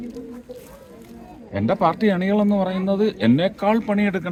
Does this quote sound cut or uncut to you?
uncut